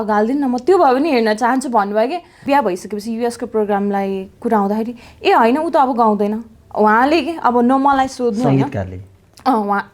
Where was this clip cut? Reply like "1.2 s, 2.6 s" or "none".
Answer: 2.4 s